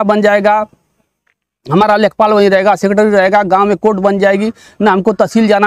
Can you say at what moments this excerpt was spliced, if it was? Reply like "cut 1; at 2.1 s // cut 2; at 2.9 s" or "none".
none